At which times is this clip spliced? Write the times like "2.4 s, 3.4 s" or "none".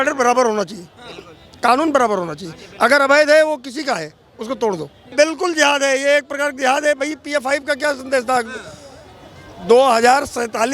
5.1 s

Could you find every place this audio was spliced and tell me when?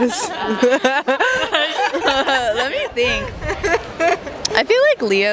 none

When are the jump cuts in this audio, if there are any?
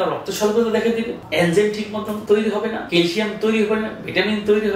1.2 s, 2.2 s, 2.8 s

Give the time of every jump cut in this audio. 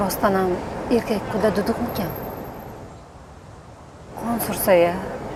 none

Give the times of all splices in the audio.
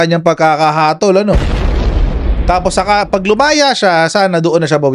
none

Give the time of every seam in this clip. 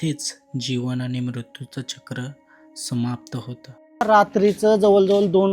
4.0 s

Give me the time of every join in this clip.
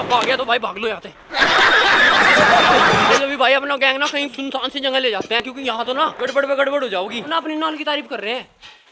none

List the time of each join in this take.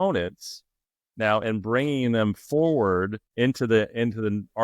3.2 s

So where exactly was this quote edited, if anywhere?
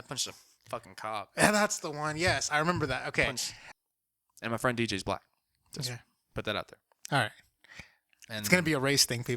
3.5 s

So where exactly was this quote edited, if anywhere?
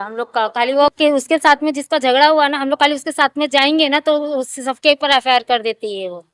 none

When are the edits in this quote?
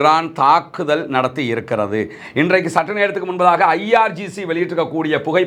none

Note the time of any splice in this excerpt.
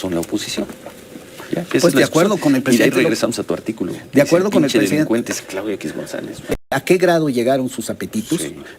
6.7 s

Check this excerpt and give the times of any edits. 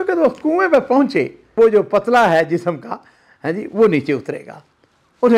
1.6 s

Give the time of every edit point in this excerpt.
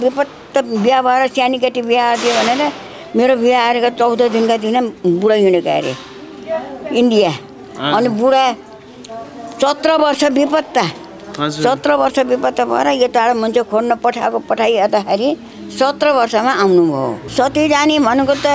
17.2 s

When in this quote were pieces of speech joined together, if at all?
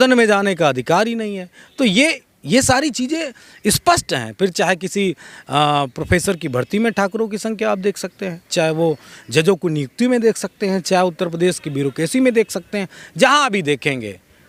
none

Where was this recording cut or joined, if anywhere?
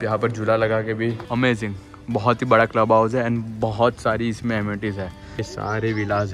1.2 s, 5.4 s

